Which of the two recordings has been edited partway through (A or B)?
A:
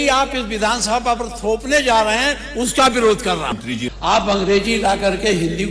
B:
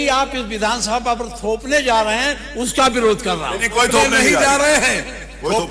A